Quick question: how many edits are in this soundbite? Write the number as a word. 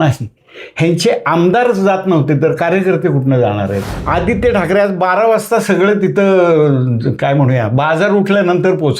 one